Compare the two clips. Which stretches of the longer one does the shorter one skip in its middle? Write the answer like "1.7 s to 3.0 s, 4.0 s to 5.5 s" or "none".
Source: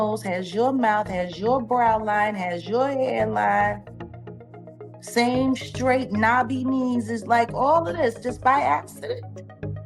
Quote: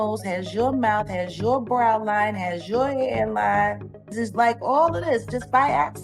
4.1 s to 7.1 s